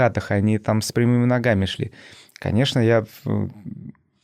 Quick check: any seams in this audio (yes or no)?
no